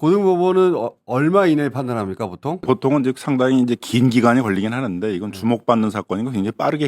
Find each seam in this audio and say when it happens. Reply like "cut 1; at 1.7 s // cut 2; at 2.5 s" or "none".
cut 1; at 2.6 s